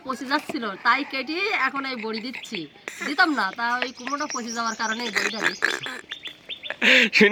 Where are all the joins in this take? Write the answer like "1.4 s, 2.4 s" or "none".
none